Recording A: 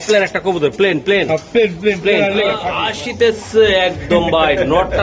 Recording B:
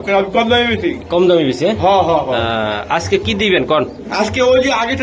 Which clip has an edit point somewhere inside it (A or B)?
A